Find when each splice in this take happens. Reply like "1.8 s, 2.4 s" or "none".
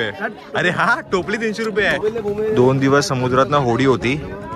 2.0 s